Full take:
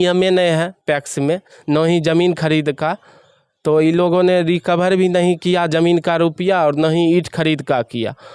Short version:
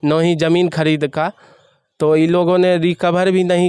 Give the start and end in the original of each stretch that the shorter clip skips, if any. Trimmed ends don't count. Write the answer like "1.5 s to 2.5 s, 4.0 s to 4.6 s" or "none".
none

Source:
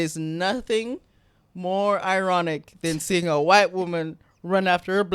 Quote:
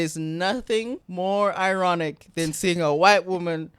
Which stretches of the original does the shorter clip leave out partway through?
1.0 s to 1.5 s

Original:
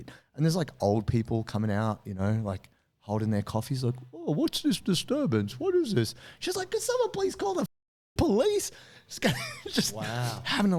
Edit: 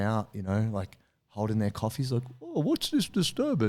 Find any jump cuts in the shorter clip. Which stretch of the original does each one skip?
none

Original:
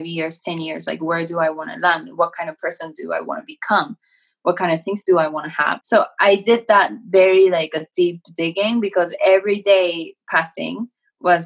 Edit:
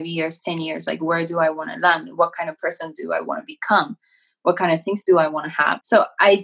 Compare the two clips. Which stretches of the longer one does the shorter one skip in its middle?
none

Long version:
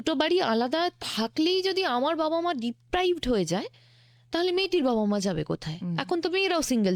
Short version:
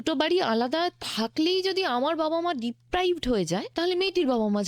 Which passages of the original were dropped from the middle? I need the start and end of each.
3.7 s to 4.2 s

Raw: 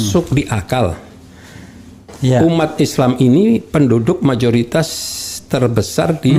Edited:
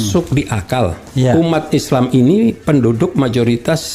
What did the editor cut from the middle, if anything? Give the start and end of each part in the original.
1.0 s to 2.1 s

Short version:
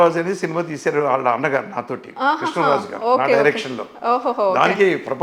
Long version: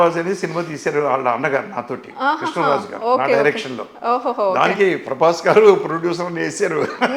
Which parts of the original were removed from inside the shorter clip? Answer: none

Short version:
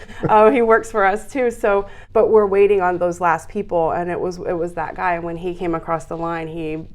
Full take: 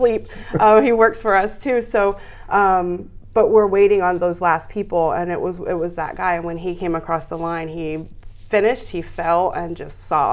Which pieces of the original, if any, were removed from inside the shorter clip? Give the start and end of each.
2.3 s to 3.2 s

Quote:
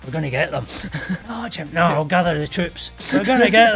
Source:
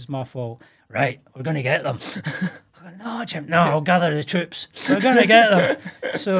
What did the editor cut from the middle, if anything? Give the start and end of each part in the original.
2.6 s to 3.0 s

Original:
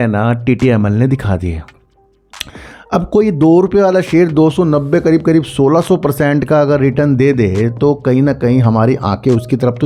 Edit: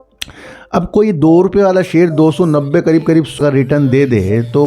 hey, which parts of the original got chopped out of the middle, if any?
5.6 s to 6.7 s

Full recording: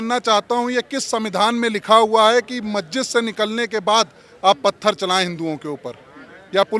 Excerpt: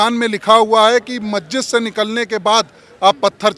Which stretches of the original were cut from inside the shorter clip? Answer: none

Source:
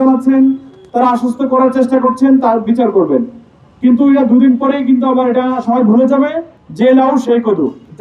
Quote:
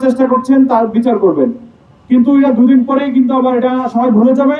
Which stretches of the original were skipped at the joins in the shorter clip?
none

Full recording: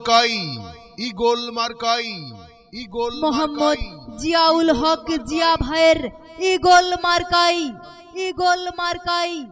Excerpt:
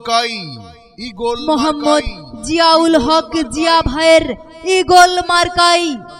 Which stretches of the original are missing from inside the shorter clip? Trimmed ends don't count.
1.4 s to 3.1 s

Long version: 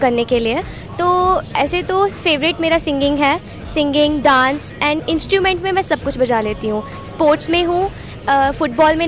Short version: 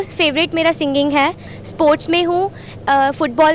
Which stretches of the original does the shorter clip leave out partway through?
3.6 s to 6.9 s

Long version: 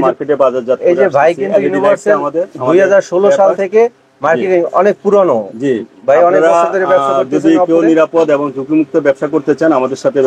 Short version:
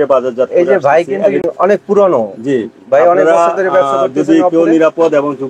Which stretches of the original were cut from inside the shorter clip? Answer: 1.7 s to 4.6 s

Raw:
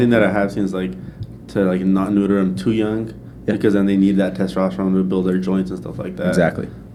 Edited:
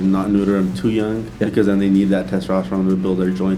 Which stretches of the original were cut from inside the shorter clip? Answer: 3.1 s to 3.3 s

